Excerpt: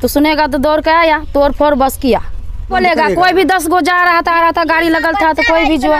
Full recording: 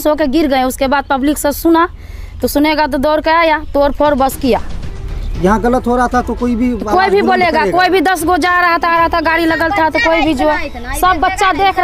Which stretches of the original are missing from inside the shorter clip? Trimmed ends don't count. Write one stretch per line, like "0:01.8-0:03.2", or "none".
0:05.1-0:07.3